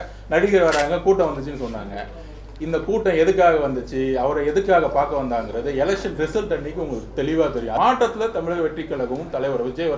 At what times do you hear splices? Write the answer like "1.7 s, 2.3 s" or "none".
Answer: 7.8 s